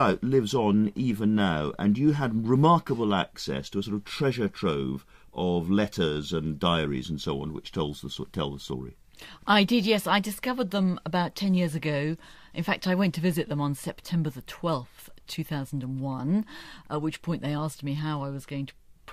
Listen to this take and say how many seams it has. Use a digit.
0